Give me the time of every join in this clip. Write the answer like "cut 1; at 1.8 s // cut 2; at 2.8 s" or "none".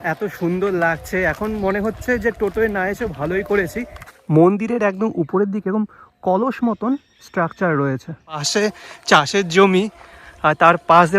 cut 1; at 3.9 s // cut 2; at 8.5 s